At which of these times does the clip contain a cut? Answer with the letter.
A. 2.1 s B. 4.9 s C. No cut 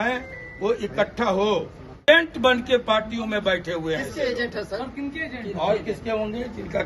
A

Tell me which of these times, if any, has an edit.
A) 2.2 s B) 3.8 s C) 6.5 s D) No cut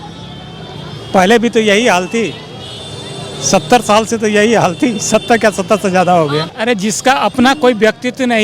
C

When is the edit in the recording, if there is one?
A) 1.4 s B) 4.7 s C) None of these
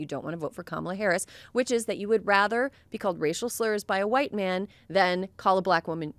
C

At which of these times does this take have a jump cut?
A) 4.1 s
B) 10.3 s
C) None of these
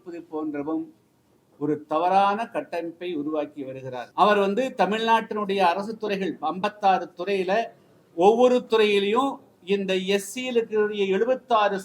A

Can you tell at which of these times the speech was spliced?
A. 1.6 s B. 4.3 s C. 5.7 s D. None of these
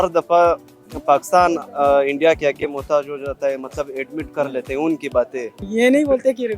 C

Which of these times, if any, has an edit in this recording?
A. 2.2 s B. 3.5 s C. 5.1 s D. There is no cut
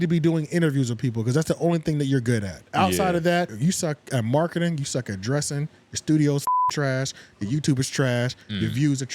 B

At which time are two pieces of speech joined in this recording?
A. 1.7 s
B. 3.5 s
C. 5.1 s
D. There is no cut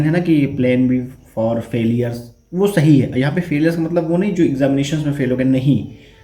D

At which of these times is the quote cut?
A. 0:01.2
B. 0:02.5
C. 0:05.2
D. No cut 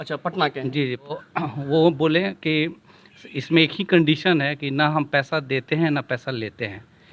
A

